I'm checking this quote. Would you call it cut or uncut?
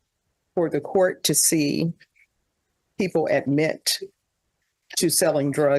uncut